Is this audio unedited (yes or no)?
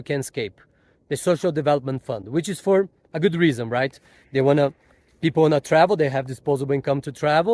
yes